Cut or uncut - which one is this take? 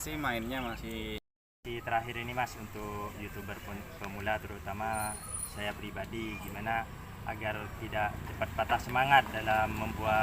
cut